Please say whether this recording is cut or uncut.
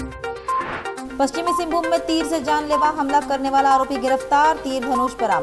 uncut